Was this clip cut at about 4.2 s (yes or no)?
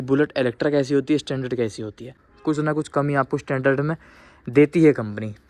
no